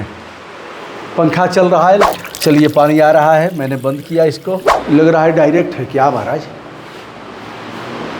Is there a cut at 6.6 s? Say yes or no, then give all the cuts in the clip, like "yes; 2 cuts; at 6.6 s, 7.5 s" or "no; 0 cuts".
no; 2 cuts; at 2.1 s, 4.7 s